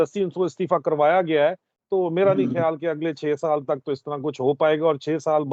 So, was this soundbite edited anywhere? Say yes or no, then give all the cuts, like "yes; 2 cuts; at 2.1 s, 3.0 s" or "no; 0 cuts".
no; 0 cuts